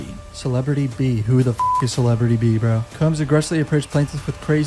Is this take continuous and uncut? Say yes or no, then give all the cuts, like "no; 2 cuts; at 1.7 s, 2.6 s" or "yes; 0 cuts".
no; 1 cut; at 2.8 s